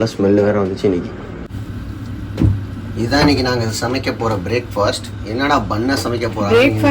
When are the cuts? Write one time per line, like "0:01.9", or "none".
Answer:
0:01.5